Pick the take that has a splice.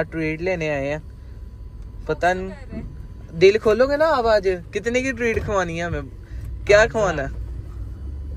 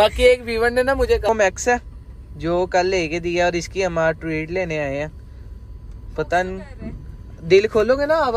second; 1 cut; at 1.3 s

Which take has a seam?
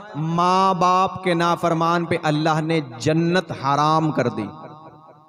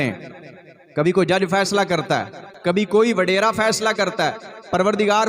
second; 1 cut; at 2.7 s

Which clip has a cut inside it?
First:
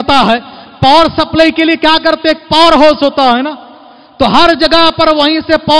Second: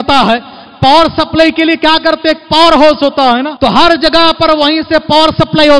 second; 1 cut; at 3.5 s

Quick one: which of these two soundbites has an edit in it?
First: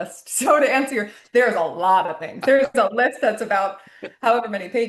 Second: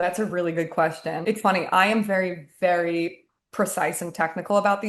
second; 1 cut; at 1.2 s

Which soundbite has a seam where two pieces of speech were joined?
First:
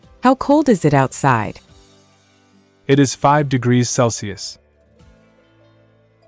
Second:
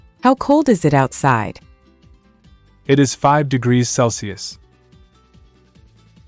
first; 1 cut; at 4.4 s

